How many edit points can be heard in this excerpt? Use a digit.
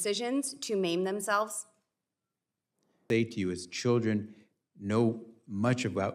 1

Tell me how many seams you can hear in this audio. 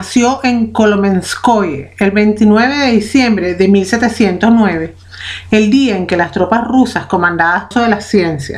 0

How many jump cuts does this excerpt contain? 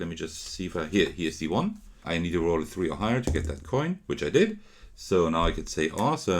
1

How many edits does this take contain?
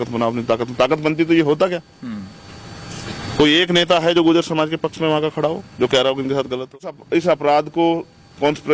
1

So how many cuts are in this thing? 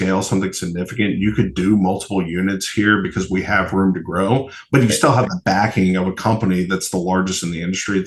0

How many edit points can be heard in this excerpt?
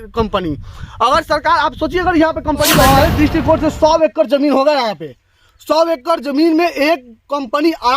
1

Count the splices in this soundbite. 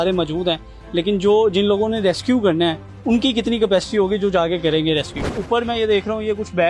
1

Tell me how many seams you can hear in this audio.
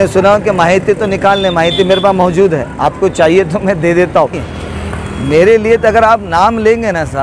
1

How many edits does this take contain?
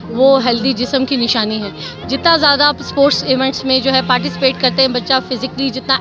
0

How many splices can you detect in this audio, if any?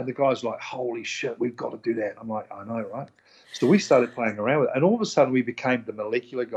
0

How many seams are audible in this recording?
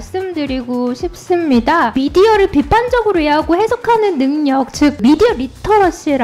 2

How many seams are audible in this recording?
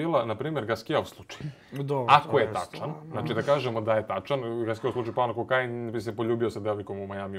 0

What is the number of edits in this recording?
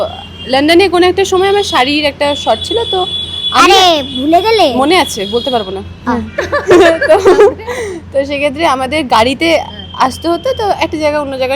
0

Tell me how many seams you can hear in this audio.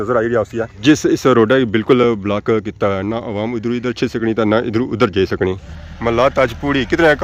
1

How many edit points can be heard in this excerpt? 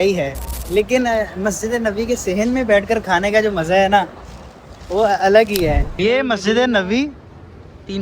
1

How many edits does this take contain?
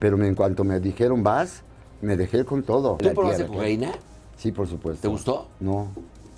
1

